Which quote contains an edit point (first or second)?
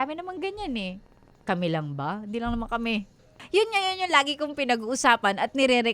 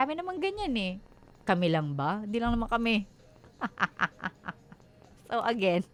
first